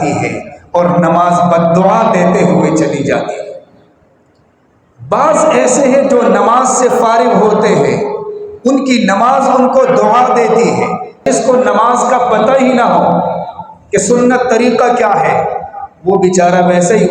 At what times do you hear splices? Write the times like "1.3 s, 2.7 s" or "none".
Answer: 11.3 s